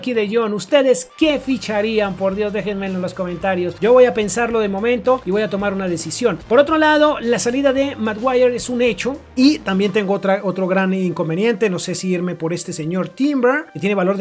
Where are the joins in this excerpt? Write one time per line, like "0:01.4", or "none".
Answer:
none

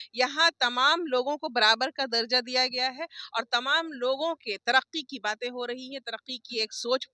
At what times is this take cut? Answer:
none

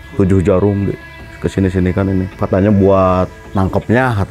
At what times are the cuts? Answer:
0:02.4

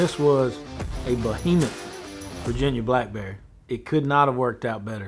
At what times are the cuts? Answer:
none

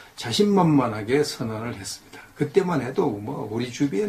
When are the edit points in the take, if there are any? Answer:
0:01.5

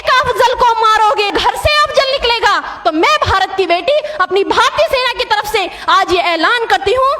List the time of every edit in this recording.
0:01.3

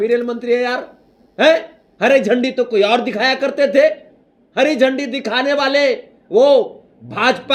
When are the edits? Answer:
none

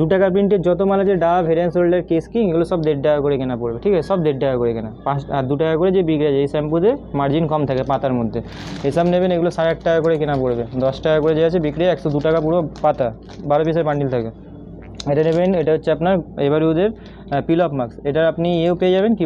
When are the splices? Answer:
none

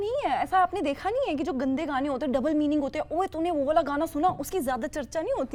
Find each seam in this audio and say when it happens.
none

